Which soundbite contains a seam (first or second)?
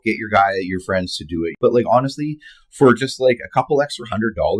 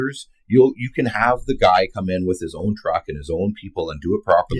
first